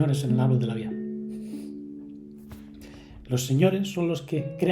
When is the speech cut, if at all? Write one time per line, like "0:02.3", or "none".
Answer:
none